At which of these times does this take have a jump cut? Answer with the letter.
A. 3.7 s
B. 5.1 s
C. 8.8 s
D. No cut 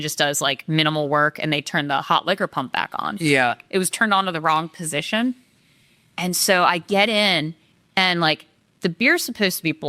D